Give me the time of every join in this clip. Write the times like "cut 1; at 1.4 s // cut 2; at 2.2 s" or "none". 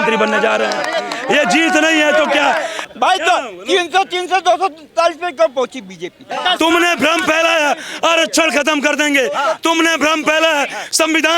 cut 1; at 2.8 s // cut 2; at 6.3 s